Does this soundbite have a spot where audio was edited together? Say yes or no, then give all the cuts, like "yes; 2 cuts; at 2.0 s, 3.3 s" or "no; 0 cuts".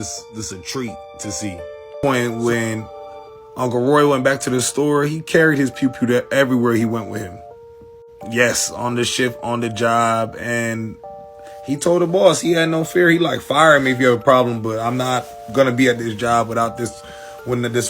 yes; 1 cut; at 1.9 s